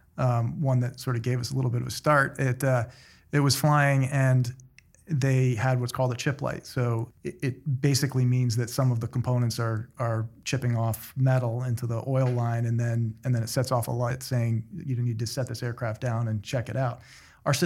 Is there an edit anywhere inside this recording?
yes; 2 cuts; at 7.1 s, 14.2 s

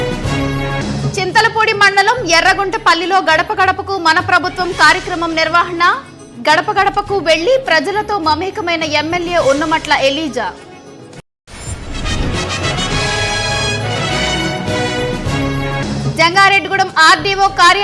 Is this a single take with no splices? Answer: yes; 0 cuts

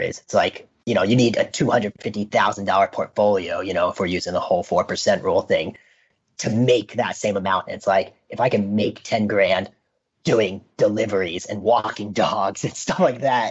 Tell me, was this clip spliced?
no; 0 cuts

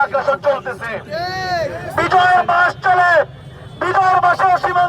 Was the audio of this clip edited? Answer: no; 0 cuts

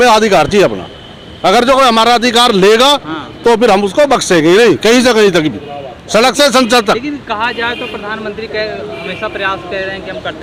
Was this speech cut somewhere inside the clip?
no; 0 cuts

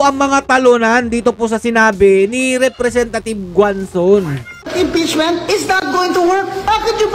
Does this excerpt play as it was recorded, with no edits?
no; 1 cut; at 4.5 s

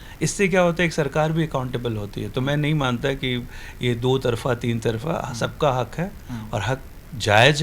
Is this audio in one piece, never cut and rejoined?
yes; 0 cuts

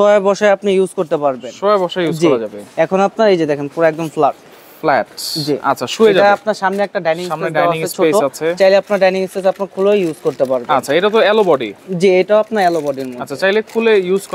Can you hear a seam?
no; 0 cuts

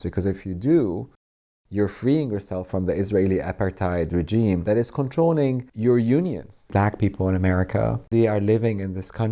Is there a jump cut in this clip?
yes; 3 cuts; at 4.6 s, 5.7 s, 6.7 s

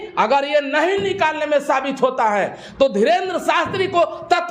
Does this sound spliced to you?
no; 0 cuts

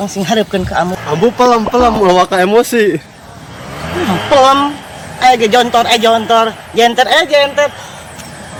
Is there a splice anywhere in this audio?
no; 0 cuts

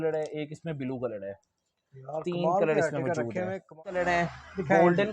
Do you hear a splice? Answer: yes; 1 cut; at 3.8 s

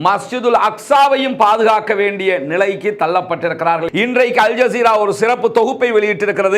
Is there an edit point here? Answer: yes; 1 cut; at 3.9 s

